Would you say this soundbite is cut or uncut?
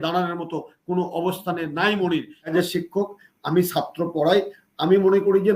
cut